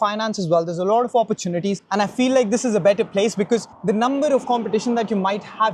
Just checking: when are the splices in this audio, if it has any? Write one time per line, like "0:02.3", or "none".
none

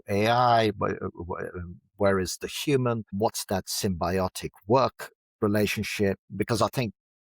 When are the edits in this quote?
0:03.1
0:06.3

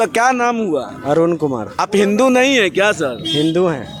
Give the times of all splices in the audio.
none

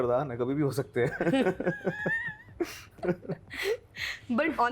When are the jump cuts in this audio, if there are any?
none

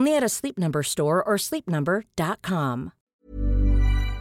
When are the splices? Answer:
0:03.1

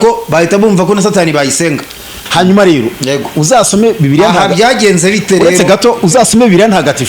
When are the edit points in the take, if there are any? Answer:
0:02.2

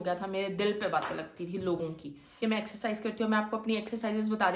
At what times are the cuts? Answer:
0:02.4

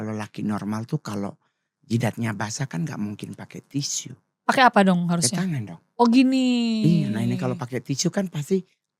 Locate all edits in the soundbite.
none

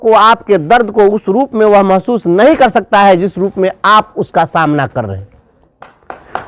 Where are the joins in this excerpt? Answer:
none

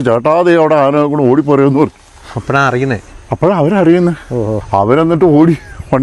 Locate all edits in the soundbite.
0:04.6

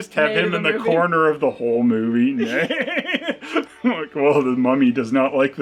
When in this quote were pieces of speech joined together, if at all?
none

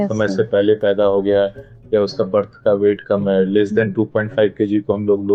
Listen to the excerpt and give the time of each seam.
none

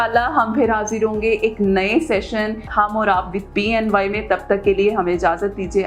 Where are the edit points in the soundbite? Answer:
0:02.7

